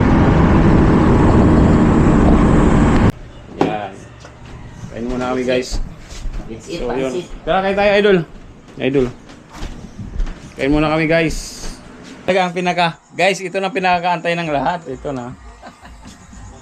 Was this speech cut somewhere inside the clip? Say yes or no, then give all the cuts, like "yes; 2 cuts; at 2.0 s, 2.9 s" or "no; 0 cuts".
yes; 2 cuts; at 3.2 s, 12.3 s